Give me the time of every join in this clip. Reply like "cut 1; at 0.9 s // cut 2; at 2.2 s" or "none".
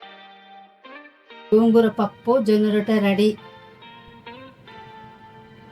cut 1; at 0.9 s